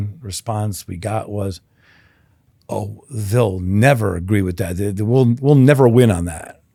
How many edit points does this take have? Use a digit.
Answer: 0